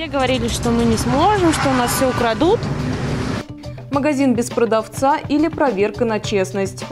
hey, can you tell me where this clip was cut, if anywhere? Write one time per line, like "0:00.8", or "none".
0:03.4